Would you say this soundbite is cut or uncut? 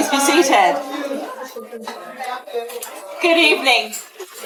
uncut